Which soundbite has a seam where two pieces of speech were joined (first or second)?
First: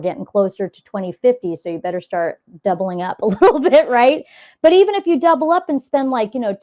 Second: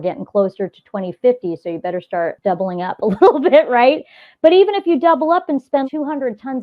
second